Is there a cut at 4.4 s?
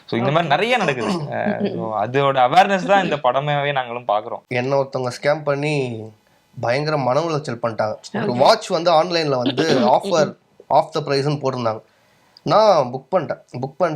yes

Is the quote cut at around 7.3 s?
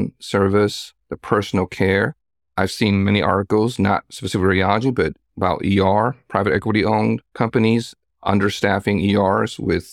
yes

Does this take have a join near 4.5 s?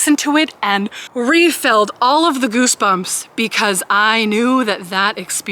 no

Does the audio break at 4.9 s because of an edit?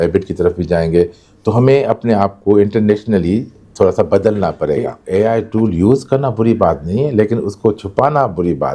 yes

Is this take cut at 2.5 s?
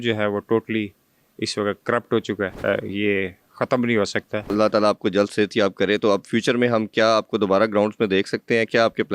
yes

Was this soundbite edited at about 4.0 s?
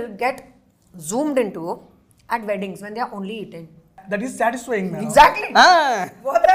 yes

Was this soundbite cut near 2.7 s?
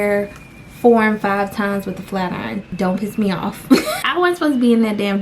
yes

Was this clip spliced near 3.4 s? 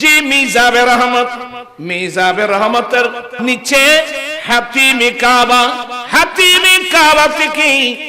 yes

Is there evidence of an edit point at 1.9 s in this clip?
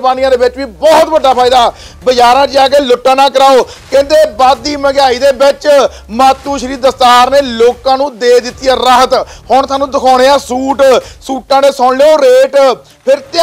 no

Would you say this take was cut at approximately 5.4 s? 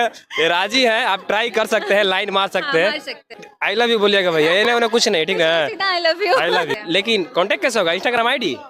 no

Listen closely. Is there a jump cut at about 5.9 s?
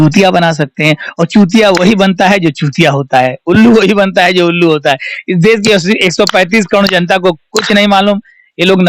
no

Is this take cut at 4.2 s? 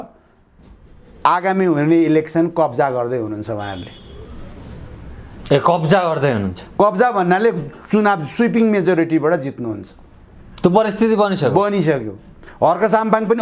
no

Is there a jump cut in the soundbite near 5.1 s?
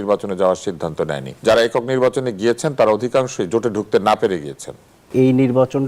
yes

